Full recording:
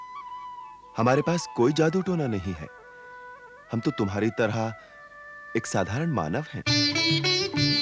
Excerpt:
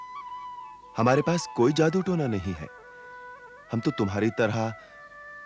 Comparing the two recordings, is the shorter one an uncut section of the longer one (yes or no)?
yes